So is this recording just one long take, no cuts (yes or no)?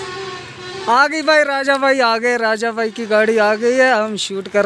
yes